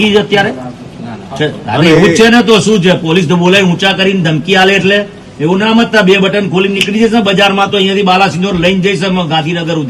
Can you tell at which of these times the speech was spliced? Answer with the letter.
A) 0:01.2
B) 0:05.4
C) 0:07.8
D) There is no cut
D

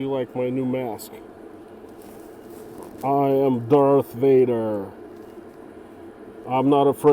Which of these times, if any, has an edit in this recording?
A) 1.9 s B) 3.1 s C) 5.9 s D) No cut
D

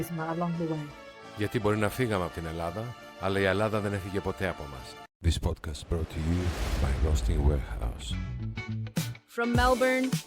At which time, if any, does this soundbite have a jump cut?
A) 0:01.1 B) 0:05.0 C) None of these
B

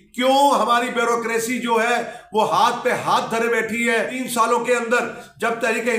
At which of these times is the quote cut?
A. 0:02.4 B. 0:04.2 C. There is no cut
B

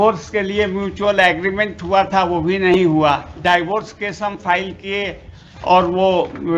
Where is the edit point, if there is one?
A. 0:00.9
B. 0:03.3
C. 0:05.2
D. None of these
B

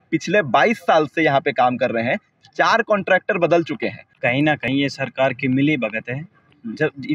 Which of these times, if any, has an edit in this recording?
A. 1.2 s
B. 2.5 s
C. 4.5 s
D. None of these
C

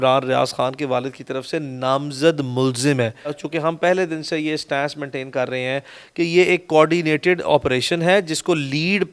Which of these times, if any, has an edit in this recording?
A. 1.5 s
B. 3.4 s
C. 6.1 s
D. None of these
B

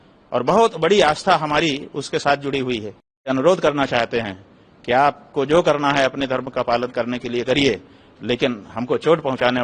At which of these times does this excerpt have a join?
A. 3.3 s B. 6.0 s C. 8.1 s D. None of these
A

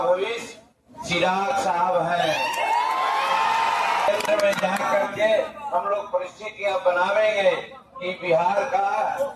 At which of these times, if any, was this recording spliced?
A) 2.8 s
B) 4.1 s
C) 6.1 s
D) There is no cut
B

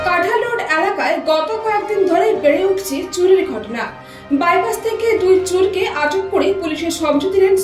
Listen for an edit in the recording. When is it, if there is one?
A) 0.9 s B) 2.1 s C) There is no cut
C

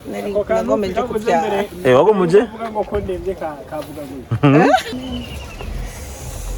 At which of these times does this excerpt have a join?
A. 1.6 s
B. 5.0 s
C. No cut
B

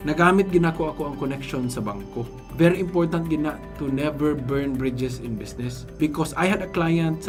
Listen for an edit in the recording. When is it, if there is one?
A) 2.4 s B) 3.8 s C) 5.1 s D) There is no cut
D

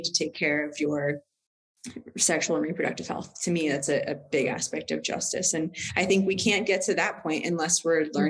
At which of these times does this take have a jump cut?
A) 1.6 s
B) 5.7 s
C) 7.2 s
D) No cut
D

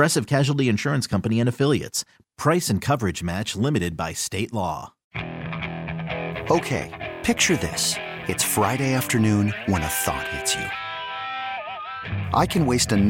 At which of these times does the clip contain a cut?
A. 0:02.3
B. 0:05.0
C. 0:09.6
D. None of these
B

